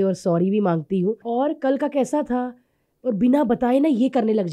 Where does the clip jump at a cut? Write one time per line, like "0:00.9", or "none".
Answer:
0:01.2